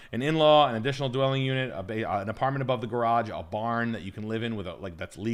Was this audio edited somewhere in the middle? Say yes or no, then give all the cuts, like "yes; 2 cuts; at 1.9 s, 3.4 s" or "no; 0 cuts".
no; 0 cuts